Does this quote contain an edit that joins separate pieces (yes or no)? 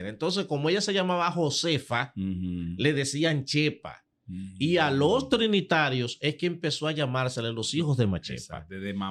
no